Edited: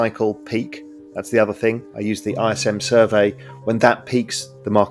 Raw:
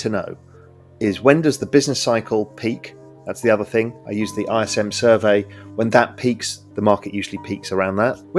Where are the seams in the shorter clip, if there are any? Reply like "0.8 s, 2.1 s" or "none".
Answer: none